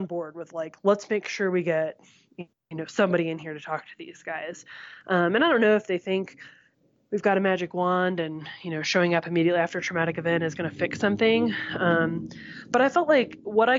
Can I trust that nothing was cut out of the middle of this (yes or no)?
yes